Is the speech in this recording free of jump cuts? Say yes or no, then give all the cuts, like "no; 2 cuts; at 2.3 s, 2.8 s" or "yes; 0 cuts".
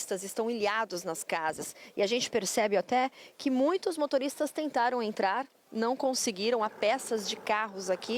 yes; 0 cuts